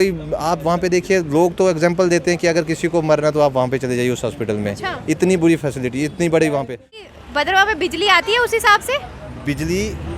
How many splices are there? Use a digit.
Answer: 1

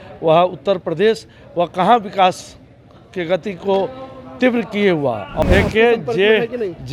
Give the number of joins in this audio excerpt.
1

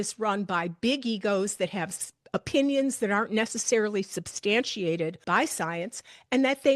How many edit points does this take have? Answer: 1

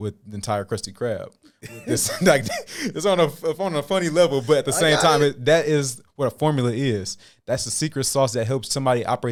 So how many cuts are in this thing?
0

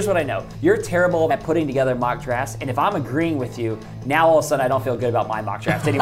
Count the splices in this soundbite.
1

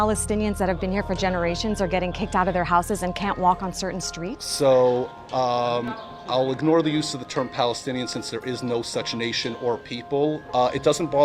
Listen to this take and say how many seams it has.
0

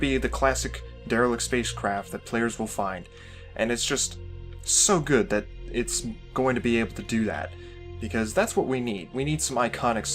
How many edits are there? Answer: 1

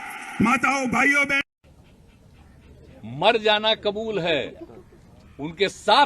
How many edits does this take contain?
1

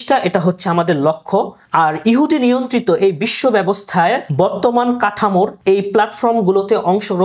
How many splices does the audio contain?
3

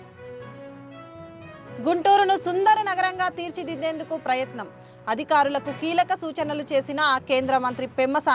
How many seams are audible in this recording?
1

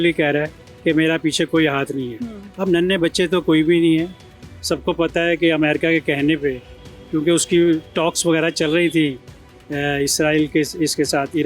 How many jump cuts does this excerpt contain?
0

